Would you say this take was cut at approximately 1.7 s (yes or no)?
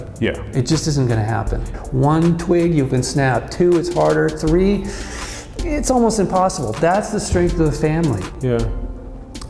yes